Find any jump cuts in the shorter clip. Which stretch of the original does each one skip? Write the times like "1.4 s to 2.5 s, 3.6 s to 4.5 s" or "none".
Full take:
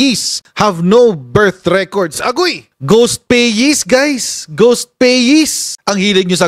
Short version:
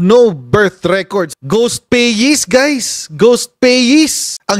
2.2 s to 2.7 s